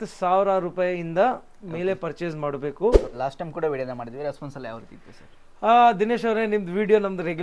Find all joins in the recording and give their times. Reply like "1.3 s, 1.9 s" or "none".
3.1 s